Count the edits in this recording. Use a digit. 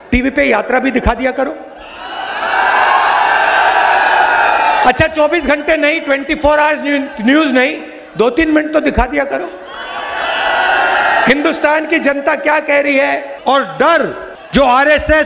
1